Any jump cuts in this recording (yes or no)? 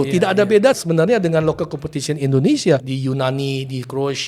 yes